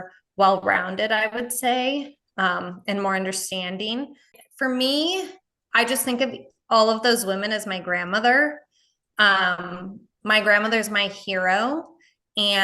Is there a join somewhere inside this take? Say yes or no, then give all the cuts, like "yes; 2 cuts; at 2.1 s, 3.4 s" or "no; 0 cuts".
yes; 1 cut; at 4.4 s